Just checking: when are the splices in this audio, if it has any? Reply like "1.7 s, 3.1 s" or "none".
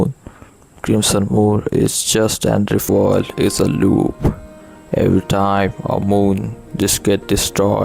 2.9 s